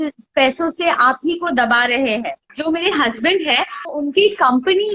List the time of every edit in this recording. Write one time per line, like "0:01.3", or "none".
0:02.5
0:03.8